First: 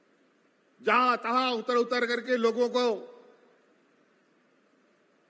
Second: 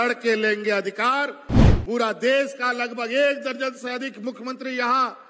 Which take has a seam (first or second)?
second